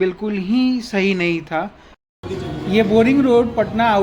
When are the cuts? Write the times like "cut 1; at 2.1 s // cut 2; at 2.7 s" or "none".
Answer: cut 1; at 2.0 s